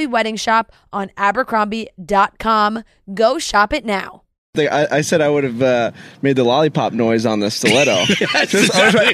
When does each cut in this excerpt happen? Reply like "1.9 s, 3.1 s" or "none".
4.5 s